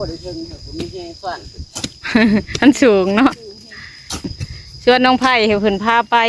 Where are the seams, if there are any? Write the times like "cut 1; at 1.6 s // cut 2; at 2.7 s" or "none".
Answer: cut 1; at 4.4 s